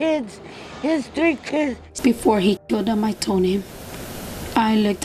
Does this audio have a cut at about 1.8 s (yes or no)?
yes